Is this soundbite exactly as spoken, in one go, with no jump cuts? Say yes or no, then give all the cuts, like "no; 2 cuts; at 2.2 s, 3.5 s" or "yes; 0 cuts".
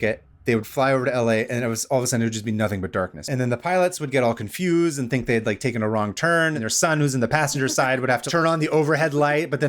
no; 3 cuts; at 3.2 s, 6.6 s, 8.2 s